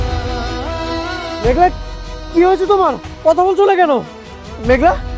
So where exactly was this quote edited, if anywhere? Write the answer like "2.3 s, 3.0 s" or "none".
none

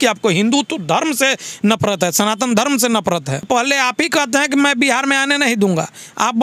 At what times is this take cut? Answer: 3.5 s

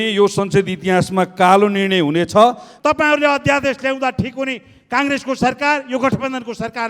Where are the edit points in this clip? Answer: 2.7 s

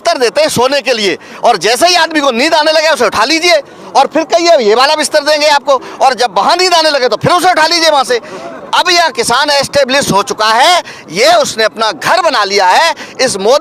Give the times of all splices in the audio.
none

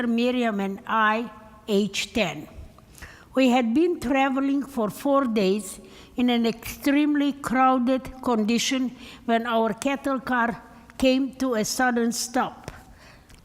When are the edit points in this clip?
7.0 s

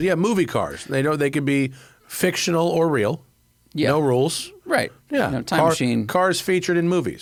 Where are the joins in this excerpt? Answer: none

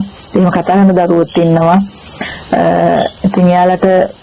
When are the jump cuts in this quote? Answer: none

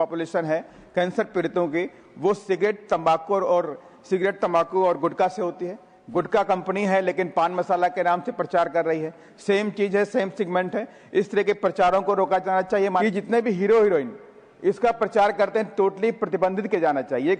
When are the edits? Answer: 5.9 s, 13.0 s

